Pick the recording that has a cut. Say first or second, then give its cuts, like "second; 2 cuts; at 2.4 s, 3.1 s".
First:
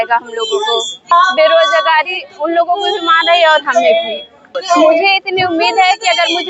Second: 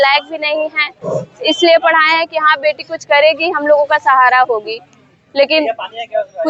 first; 2 cuts; at 1.1 s, 4.4 s